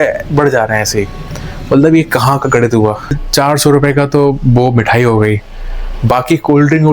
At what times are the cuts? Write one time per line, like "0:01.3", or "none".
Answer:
0:03.2